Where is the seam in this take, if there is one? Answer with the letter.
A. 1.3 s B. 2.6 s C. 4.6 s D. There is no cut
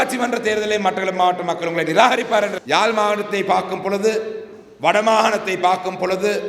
B